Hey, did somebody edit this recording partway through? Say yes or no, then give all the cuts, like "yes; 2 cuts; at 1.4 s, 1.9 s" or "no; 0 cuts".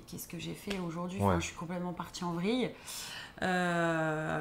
no; 0 cuts